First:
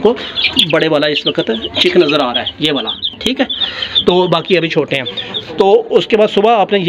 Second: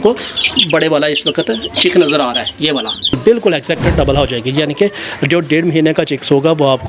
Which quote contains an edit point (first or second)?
second